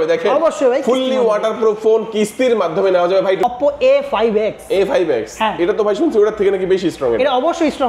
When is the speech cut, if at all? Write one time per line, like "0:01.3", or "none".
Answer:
0:03.4